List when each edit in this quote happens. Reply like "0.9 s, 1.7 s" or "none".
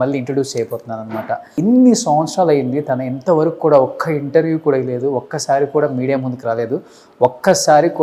1.5 s